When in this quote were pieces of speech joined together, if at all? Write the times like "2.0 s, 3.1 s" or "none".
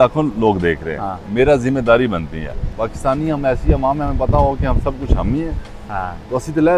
2.7 s